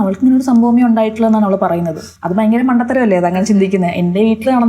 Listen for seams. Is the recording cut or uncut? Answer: cut